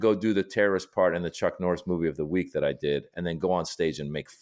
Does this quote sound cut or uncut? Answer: uncut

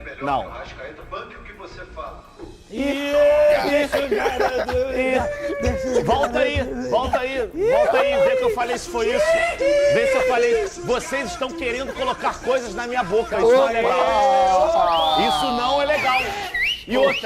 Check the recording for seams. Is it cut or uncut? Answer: uncut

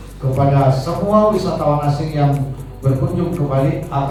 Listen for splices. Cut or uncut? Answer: uncut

